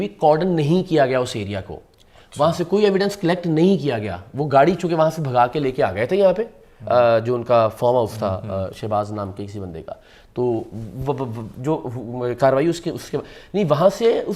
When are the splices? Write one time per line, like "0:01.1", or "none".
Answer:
none